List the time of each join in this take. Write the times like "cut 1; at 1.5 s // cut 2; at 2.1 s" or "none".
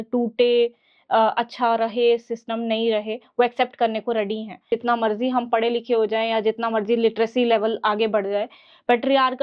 cut 1; at 4.7 s